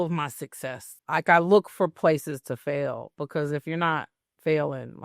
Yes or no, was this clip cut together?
yes